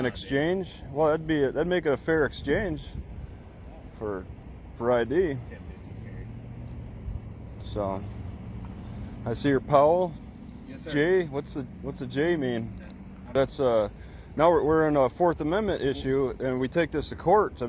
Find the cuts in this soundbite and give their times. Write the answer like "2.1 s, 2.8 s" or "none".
13.3 s